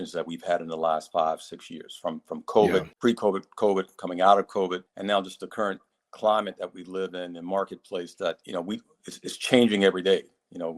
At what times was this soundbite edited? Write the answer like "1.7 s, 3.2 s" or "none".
2.9 s, 4.9 s, 8.4 s